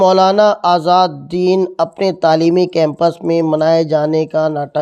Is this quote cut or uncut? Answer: uncut